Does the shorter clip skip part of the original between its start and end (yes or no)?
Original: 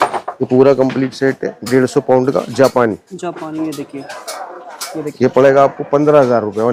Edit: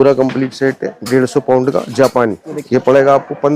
yes